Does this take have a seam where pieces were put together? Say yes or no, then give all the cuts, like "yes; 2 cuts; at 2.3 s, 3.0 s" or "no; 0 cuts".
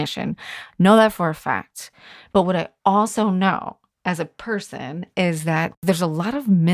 yes; 2 cuts; at 2.1 s, 5.7 s